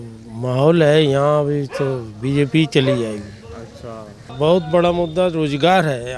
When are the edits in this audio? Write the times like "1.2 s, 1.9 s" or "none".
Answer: 4.2 s